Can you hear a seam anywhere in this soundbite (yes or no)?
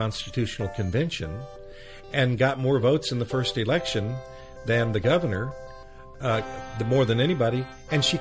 no